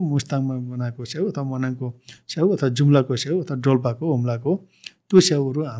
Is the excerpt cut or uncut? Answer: uncut